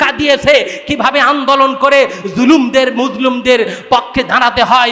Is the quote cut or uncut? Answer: uncut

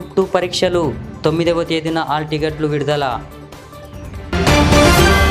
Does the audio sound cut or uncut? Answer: uncut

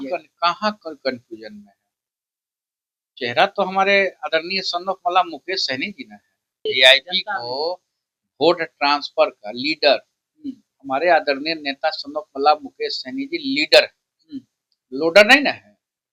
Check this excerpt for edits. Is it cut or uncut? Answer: cut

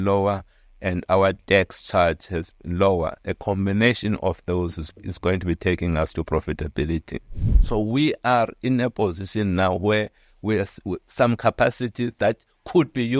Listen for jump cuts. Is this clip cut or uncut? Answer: cut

